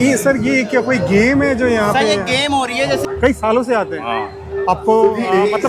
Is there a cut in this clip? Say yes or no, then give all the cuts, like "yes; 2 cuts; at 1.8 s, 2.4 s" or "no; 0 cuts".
yes; 1 cut; at 3.0 s